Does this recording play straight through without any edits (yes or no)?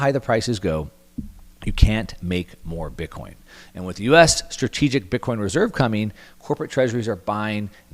yes